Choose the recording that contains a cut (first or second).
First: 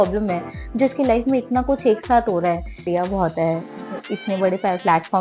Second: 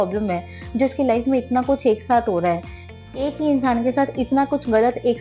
first